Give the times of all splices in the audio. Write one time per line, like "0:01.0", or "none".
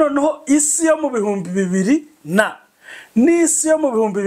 none

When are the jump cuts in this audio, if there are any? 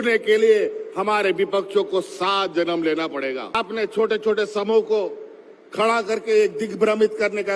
0:03.5

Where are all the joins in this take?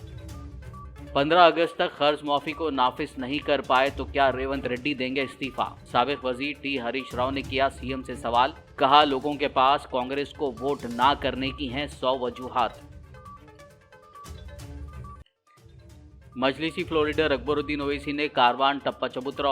0:01.0

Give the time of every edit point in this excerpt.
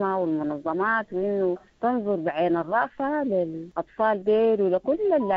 0:03.7

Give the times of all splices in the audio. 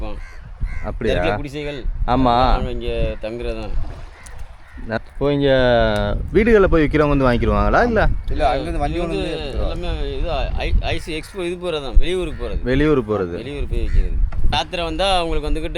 0:05.0
0:14.5

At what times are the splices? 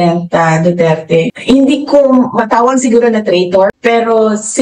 0:01.3

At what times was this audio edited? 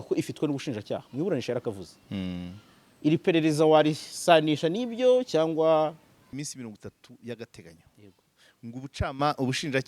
0:06.4

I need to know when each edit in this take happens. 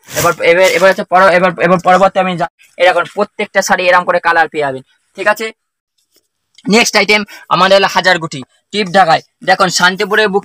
0:02.5

